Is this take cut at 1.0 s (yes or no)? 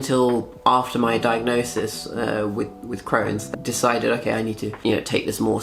no